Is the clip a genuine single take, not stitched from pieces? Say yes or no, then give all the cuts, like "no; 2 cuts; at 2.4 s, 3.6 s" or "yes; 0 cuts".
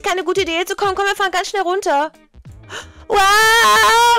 yes; 0 cuts